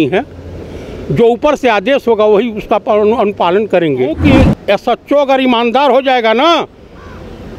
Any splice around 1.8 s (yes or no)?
no